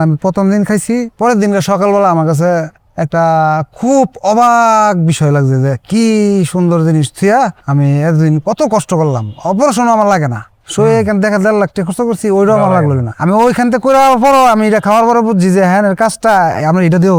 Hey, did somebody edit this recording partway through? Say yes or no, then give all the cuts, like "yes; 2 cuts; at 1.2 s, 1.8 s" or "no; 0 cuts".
no; 0 cuts